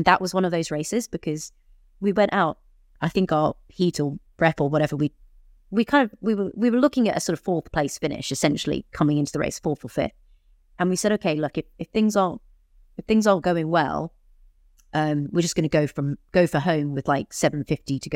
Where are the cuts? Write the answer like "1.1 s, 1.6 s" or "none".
none